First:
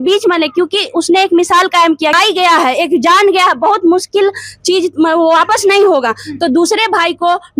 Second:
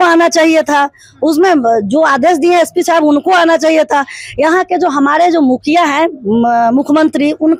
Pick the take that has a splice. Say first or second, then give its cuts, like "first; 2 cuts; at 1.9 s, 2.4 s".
first; 1 cut; at 2.2 s